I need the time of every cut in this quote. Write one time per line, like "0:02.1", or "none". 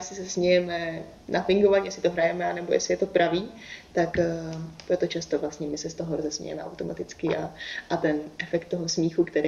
none